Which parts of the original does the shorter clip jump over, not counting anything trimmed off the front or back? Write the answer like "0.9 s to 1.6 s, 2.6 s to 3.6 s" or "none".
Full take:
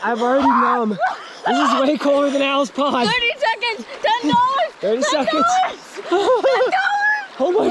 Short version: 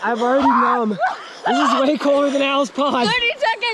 none

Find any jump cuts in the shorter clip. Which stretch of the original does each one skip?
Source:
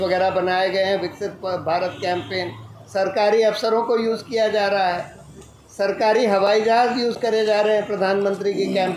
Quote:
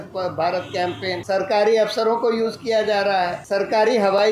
2.5 s to 2.9 s, 5.0 s to 5.7 s

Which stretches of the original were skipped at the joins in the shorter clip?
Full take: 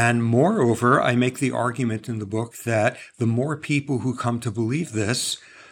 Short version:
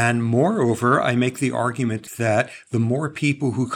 2.1 s to 2.5 s

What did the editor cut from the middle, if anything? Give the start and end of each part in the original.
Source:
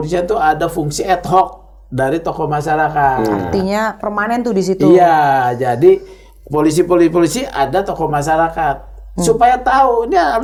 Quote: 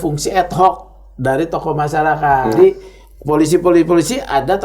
3.3 s to 5.8 s

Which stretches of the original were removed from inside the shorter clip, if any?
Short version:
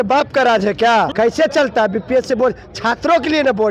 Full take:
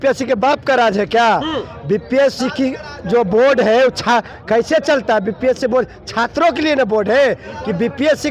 1.4 s to 4.4 s

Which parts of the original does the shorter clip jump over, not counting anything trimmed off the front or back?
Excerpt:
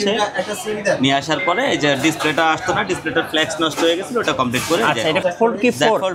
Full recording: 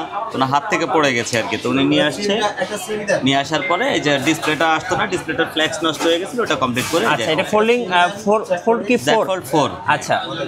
7.4 s to 8.5 s

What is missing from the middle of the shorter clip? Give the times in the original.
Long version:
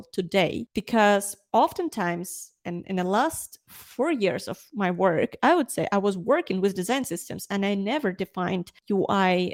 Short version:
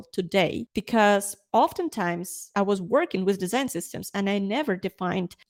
2.5 s to 5.9 s

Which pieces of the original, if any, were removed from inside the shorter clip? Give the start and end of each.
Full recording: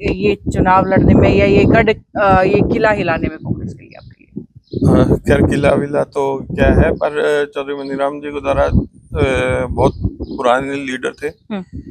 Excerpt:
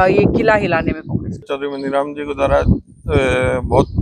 3.9 s to 7.6 s

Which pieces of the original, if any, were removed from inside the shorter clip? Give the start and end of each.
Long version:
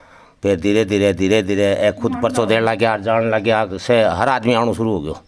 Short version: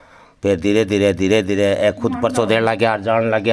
none

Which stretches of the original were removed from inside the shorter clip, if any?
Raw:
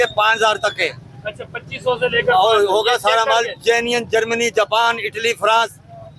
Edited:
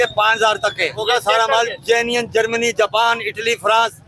1.0 s to 2.8 s

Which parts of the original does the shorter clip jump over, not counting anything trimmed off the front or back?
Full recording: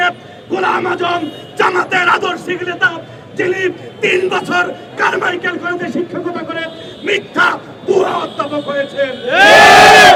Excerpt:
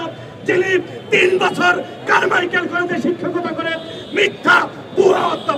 none

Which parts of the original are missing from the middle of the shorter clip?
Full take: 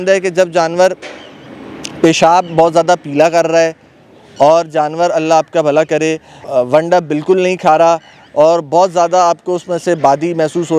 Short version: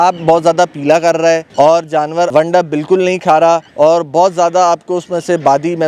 3.8 s to 4.3 s, 5.1 s to 6.7 s, 8.1 s to 8.3 s

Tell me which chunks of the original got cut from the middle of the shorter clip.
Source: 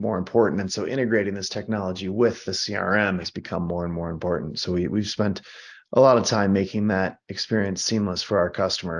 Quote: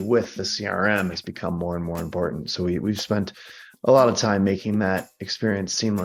none

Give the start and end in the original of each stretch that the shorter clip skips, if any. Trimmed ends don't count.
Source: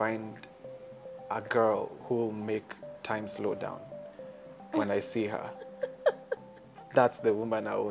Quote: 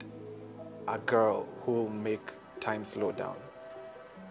none

